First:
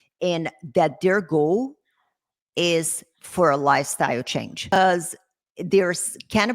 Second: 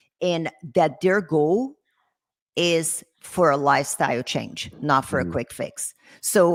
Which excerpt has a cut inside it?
first; 1 cut; at 4.8 s

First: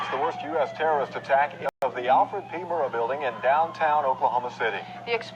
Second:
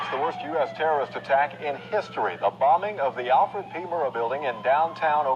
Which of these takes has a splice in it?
first; 1 cut; at 1.7 s

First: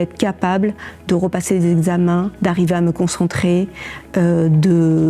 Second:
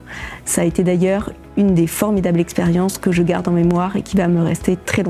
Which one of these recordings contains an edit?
first; 1 cut; at 2.3 s

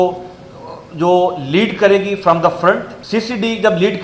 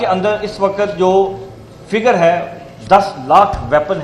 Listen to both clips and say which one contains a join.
first; 1 cut; at 2.9 s

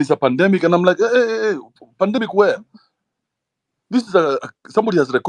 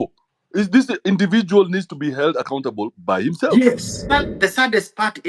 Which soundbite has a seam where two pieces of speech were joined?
second; 1 cut; at 4.1 s

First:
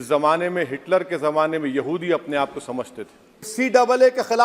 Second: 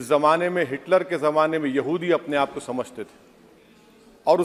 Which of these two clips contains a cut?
first; 1 cut; at 3.5 s

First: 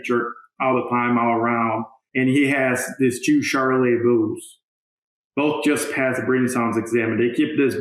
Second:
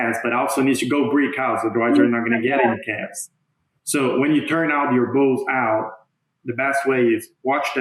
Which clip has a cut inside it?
first; 1 cut; at 2.0 s

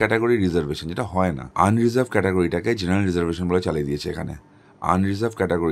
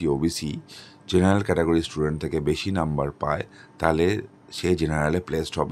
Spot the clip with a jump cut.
first; 1 cut; at 1.4 s

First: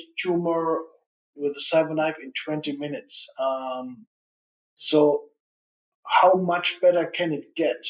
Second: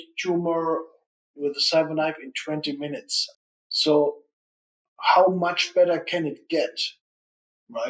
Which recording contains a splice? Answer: second; 1 cut; at 3.2 s

